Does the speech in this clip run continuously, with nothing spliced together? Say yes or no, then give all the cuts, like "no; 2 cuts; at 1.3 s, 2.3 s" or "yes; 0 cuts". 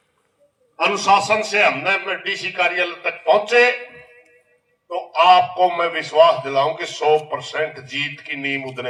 yes; 0 cuts